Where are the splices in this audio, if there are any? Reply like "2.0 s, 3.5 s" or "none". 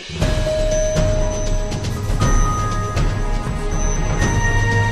none